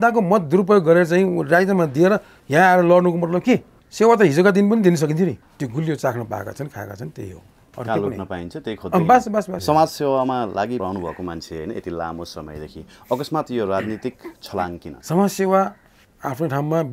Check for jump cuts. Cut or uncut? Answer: cut